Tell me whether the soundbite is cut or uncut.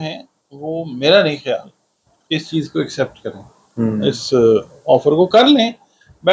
uncut